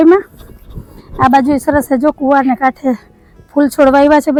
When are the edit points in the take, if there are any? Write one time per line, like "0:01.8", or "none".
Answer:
none